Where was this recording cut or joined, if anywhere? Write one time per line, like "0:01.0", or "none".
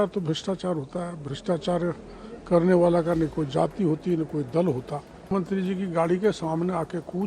0:05.2